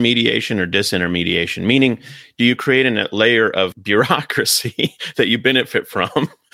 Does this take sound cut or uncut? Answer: cut